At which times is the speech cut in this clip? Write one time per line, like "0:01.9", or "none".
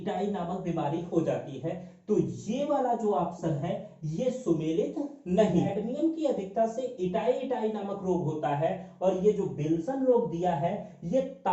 0:05.7